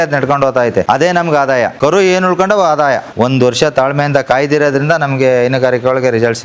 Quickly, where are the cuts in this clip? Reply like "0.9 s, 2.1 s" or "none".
0.9 s, 1.7 s, 3.1 s